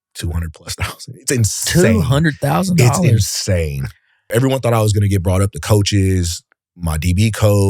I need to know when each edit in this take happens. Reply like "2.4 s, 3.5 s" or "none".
4.3 s